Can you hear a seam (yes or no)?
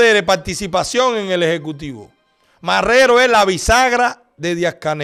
no